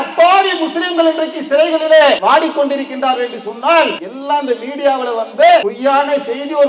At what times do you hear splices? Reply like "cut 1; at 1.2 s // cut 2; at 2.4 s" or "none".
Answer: cut 1; at 2.2 s // cut 2; at 4.1 s // cut 3; at 5.7 s